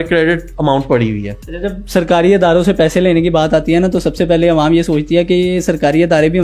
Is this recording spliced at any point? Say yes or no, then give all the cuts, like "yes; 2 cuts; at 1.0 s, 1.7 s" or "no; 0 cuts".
no; 0 cuts